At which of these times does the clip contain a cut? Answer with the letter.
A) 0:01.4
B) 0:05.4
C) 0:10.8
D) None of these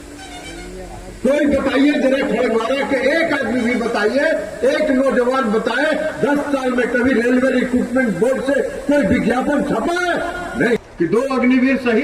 C